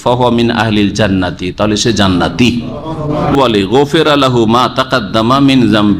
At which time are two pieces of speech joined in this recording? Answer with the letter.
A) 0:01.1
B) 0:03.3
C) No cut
B